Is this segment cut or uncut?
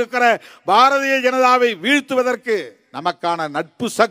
cut